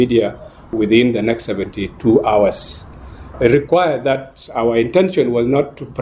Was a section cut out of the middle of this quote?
yes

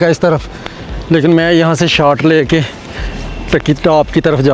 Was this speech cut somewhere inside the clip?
no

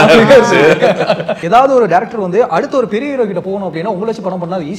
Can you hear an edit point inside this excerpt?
yes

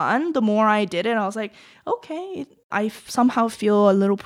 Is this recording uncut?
no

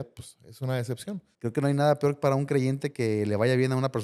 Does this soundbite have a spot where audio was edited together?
yes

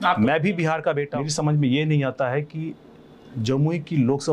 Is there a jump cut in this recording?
yes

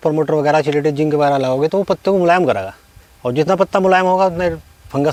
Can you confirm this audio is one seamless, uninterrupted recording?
yes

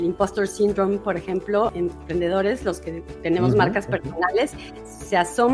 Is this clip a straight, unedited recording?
no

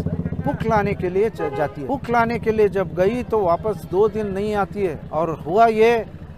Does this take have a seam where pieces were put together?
yes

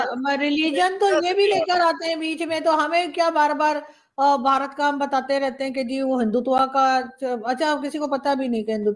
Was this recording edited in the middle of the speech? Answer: no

